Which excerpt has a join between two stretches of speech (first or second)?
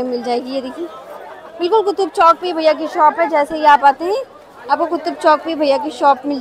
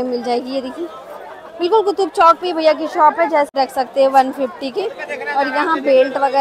second